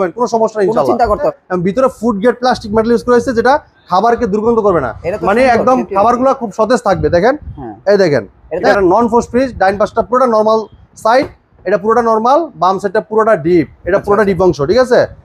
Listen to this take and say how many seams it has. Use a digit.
2